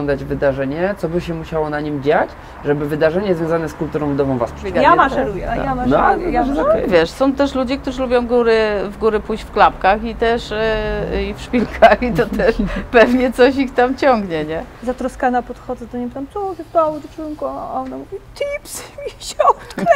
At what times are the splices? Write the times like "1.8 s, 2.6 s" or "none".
4.6 s, 14.7 s